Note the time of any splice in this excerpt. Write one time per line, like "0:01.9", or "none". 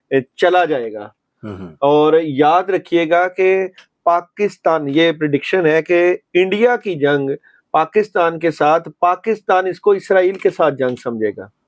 none